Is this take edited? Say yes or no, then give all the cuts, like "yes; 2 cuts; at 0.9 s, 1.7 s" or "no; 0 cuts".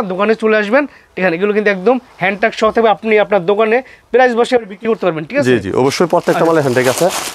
no; 0 cuts